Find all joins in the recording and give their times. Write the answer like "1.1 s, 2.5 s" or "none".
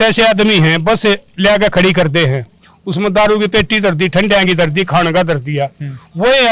none